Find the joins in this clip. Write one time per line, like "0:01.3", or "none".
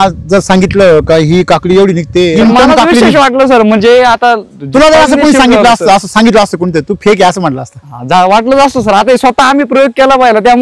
0:02.3